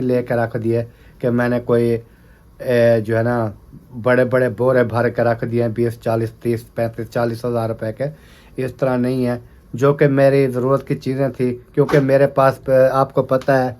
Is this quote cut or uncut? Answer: uncut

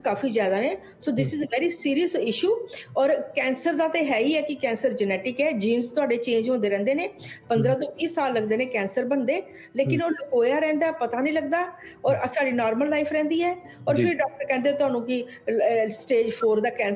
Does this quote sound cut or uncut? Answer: uncut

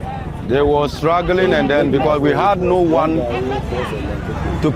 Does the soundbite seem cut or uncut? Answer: uncut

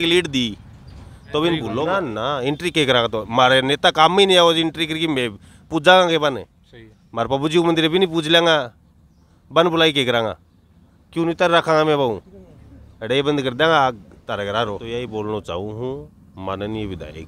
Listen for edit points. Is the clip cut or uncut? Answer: cut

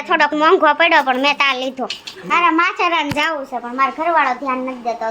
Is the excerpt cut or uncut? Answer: cut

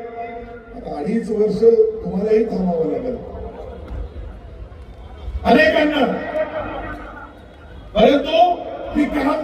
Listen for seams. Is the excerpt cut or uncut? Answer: uncut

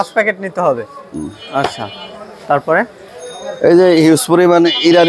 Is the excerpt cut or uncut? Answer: uncut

